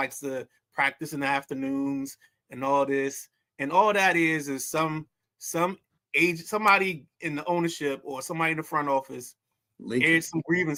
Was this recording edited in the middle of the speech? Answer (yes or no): no